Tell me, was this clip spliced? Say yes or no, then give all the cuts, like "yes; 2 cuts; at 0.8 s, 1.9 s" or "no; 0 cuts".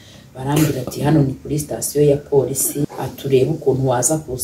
yes; 1 cut; at 2.9 s